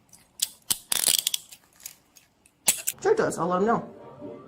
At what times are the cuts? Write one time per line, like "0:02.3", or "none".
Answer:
0:02.9